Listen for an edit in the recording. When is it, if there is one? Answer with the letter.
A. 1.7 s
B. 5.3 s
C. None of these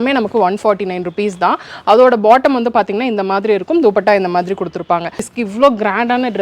B